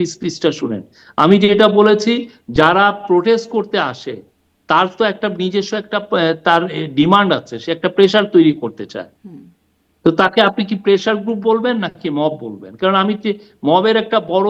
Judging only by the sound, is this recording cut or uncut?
uncut